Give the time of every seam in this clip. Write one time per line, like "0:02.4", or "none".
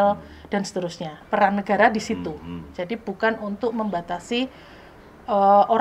0:01.1